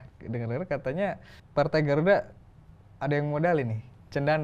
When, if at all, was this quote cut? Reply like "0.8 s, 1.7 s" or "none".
1.3 s